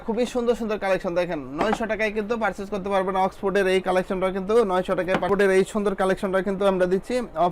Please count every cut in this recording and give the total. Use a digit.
1